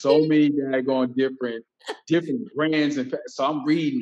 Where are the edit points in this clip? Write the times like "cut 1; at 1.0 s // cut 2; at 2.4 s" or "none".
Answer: cut 1; at 1.7 s